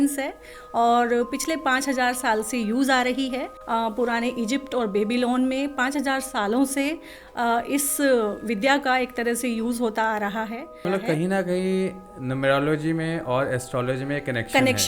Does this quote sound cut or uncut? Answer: cut